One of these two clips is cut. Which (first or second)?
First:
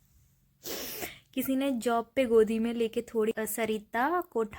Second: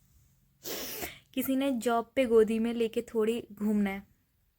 first